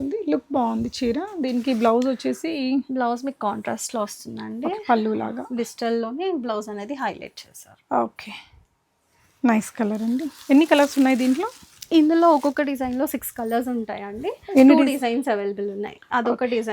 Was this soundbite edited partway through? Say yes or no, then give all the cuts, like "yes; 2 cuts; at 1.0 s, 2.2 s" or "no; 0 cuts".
no; 0 cuts